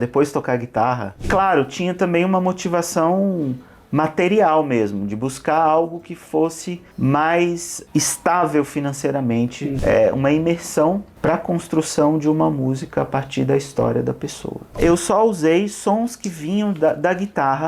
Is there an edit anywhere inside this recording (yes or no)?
yes